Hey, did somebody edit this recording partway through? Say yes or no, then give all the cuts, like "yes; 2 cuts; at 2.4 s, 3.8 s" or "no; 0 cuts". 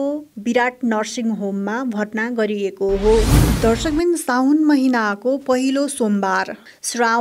yes; 1 cut; at 3.4 s